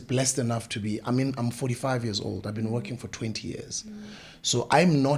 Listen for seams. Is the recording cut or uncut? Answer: uncut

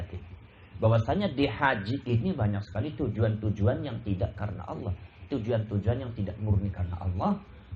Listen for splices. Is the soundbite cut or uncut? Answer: uncut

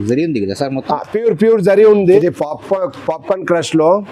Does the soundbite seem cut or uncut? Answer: cut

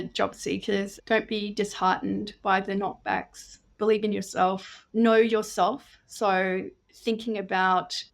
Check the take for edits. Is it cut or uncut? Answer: cut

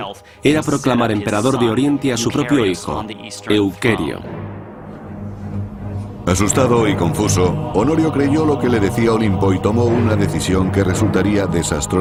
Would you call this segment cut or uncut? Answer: uncut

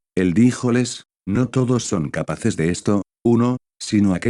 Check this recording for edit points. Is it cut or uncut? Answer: uncut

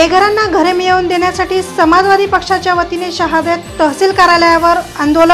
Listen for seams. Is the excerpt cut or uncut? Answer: uncut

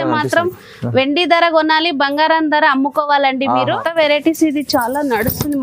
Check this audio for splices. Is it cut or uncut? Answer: cut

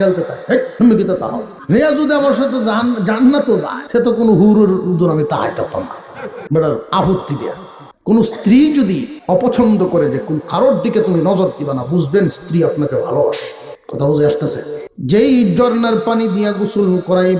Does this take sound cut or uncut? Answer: cut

